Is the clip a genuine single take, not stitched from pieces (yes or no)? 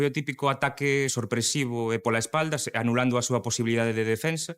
no